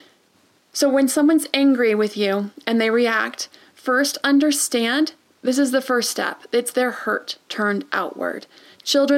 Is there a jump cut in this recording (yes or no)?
no